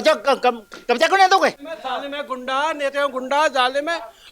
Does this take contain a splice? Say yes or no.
yes